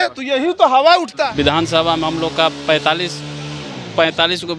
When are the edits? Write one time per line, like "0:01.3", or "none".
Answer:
0:01.1